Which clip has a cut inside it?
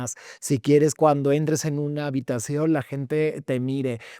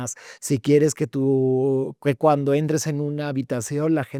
first; 1 cut; at 1.0 s

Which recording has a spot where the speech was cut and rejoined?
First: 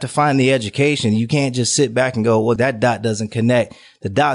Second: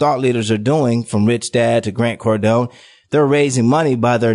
first; 1 cut; at 2.6 s

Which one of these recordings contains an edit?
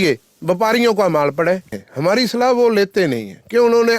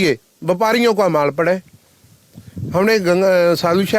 first; 1 cut; at 1.8 s

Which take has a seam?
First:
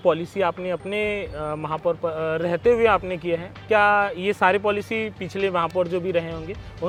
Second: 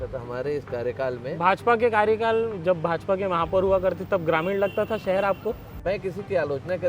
second; 1 cut; at 5.7 s

